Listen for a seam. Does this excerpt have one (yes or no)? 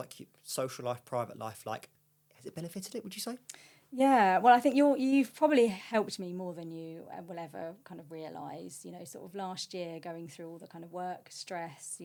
no